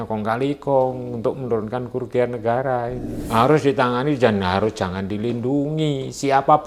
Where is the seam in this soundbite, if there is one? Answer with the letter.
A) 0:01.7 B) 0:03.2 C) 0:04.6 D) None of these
B